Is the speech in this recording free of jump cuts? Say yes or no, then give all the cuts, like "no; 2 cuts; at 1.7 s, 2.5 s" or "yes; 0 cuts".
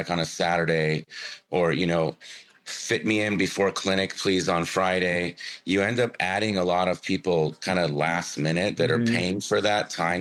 yes; 0 cuts